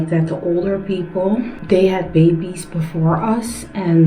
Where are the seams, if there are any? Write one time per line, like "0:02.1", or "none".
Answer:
none